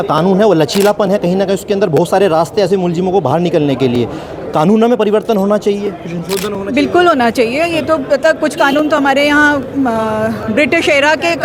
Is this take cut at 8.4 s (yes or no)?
no